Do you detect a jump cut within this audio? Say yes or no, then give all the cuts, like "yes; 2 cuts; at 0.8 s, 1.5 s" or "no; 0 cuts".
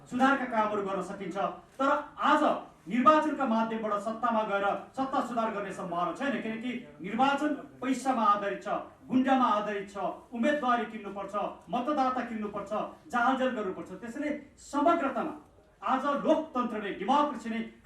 no; 0 cuts